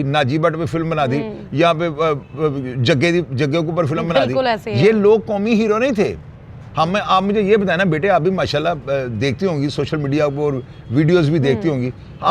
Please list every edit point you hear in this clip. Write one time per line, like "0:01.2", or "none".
none